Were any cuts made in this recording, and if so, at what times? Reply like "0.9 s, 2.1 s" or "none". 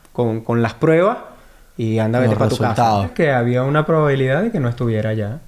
3.1 s